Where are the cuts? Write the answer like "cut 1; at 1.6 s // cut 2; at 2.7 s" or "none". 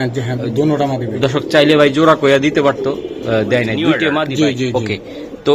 cut 1; at 4.3 s